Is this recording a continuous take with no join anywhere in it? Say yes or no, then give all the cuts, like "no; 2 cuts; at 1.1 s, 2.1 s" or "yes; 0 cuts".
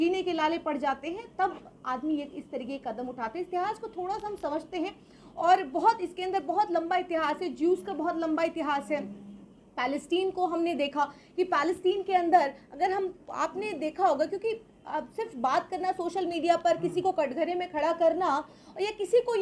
yes; 0 cuts